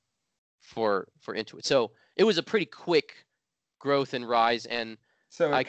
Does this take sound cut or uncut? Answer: uncut